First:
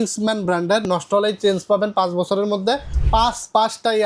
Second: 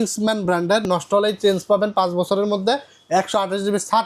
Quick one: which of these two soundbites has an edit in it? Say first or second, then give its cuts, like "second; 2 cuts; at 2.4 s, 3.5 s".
first; 1 cut; at 2.9 s